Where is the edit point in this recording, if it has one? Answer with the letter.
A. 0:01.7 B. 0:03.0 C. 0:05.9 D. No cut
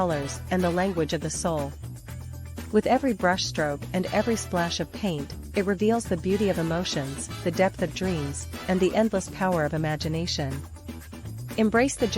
A